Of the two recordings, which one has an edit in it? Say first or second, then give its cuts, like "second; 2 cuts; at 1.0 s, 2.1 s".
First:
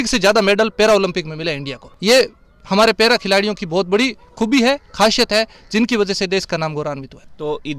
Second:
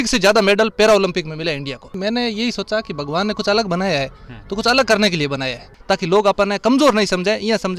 second; 2 cuts; at 1.9 s, 5.7 s